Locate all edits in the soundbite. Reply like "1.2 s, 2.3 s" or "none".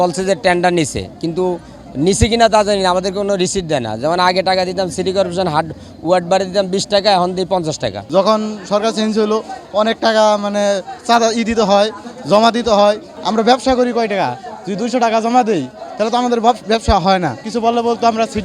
8.0 s, 13.1 s, 17.4 s